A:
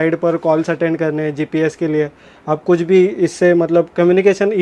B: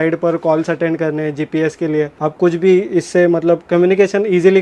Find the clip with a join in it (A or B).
B